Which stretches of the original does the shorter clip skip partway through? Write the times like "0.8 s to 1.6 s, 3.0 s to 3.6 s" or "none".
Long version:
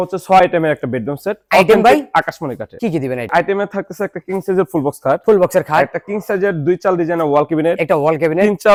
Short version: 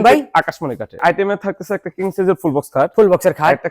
2.7 s to 3.2 s